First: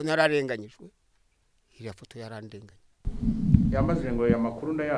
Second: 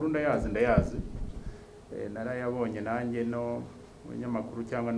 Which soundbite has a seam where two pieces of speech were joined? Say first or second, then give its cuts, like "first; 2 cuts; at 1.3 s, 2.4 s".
first; 1 cut; at 3.1 s